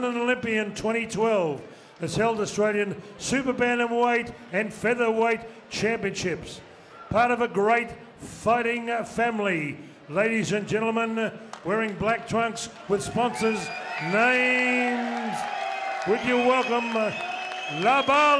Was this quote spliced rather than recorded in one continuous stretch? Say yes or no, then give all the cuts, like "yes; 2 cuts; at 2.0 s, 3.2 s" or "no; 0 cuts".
yes; 1 cut; at 10.8 s